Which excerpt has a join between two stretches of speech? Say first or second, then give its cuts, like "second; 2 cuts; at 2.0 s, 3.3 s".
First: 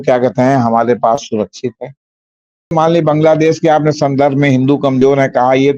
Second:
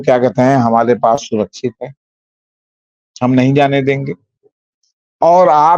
first; 1 cut; at 2.7 s